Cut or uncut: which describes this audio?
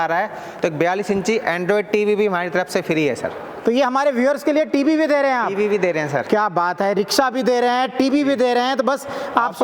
uncut